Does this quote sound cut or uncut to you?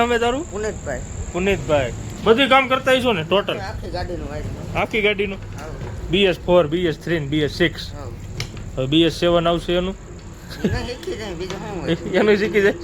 cut